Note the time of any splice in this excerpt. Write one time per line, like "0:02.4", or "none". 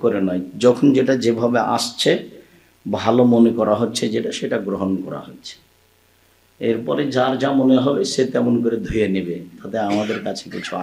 none